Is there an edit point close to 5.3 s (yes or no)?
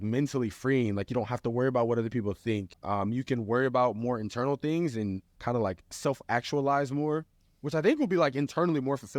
yes